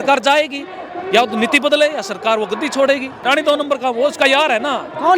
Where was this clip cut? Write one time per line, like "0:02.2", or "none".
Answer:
0:03.2